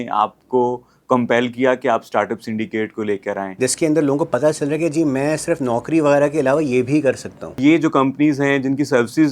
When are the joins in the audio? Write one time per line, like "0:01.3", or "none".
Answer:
0:03.5
0:07.6